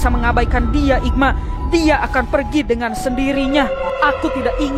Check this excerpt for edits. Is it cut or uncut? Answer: cut